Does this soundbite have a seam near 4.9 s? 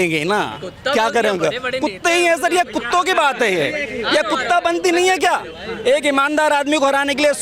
no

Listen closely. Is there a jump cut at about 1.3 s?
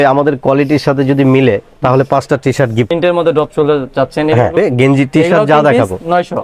no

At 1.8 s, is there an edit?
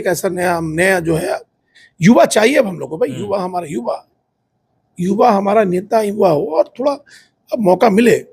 yes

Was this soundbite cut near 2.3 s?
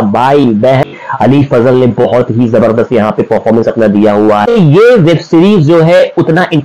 no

